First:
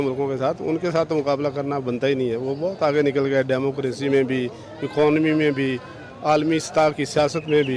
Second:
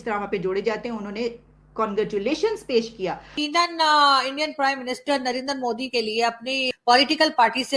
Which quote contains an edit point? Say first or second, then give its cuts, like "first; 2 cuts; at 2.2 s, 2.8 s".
second; 2 cuts; at 3.4 s, 6.7 s